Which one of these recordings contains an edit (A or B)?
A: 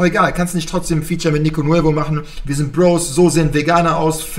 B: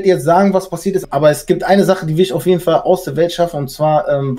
B